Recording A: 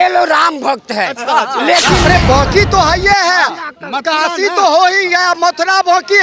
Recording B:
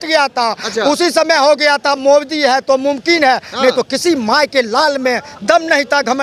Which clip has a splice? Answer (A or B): A